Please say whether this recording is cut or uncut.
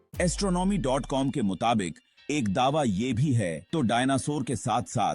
cut